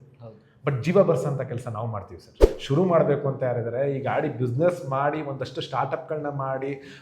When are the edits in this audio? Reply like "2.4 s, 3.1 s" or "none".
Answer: 2.5 s